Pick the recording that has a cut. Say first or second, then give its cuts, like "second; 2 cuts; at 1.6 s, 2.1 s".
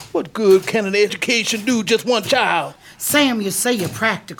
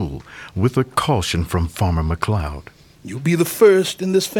first; 2 cuts; at 1.2 s, 2.8 s